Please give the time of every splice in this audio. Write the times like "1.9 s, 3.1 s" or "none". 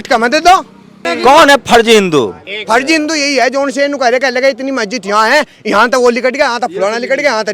1.1 s